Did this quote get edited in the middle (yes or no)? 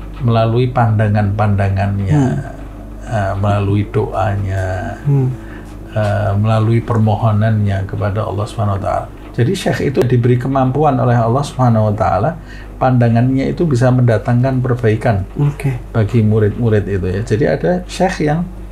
yes